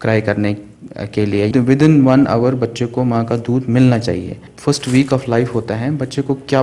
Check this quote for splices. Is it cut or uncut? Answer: cut